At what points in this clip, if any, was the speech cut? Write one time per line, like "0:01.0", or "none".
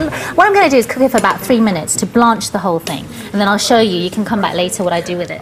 0:01.4